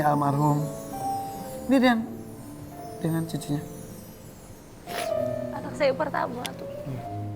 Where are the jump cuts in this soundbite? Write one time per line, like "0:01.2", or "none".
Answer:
none